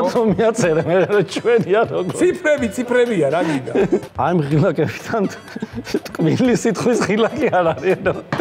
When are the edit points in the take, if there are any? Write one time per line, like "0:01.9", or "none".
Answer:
0:04.1